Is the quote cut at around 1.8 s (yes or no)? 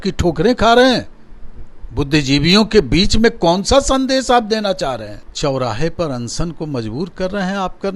no